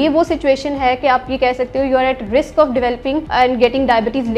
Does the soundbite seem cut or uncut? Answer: cut